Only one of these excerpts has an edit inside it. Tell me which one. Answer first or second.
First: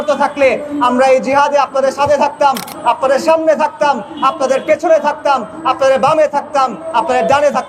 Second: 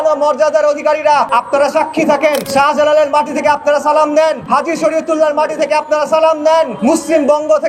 second